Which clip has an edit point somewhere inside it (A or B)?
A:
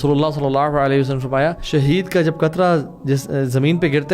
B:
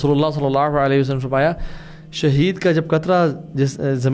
A